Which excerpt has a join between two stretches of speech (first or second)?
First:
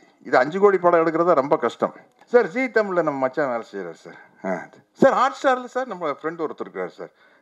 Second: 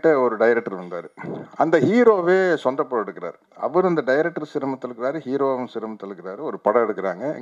first